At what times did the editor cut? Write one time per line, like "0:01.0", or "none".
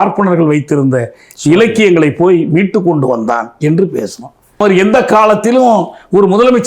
0:04.6